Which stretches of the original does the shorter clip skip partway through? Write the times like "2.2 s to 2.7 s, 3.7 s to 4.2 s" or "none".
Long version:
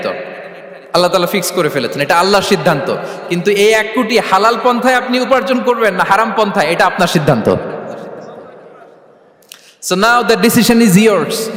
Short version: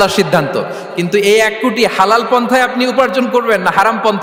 none